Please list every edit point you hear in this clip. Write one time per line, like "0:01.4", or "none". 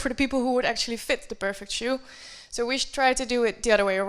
none